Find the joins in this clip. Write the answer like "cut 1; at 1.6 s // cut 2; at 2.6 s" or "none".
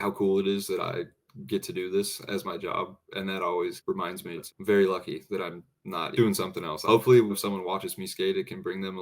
cut 1; at 4.4 s // cut 2; at 6.2 s // cut 3; at 7.3 s